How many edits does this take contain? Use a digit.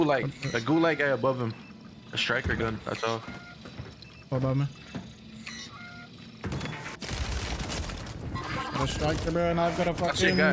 0